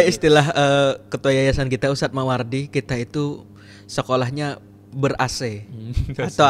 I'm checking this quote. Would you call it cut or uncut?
uncut